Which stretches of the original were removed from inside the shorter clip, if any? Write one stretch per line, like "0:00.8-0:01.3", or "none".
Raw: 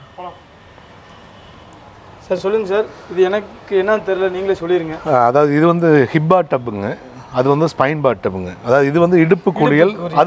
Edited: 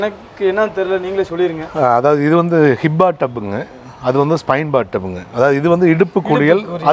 none